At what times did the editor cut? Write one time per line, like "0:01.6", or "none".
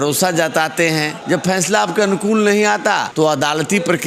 0:01.1
0:03.1